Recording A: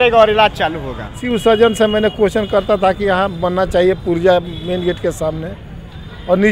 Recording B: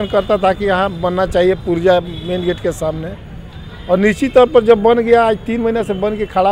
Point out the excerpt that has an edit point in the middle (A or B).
A